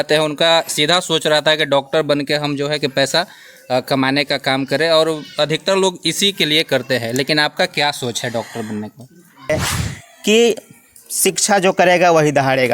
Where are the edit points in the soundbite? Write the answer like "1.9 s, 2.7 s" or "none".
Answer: 9.5 s